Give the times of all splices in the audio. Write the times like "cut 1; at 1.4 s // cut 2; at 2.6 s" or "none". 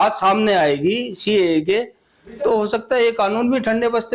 none